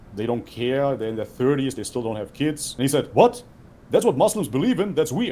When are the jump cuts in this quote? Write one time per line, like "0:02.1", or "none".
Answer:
0:02.7